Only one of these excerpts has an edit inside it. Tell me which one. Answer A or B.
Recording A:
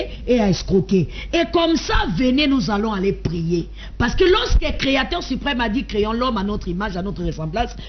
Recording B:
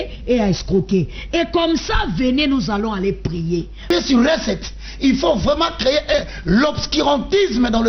B